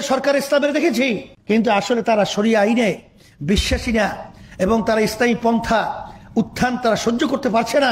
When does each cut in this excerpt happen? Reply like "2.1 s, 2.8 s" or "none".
1.3 s